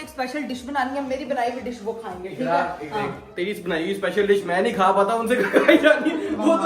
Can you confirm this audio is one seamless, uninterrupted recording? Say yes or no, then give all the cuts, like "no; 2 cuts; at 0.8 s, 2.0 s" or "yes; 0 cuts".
yes; 0 cuts